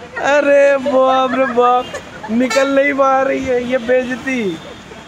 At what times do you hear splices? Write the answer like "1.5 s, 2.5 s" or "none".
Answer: none